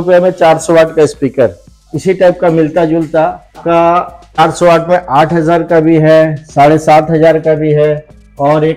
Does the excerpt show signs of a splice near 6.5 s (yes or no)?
no